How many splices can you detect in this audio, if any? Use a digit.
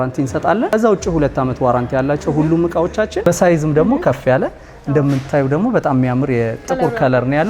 2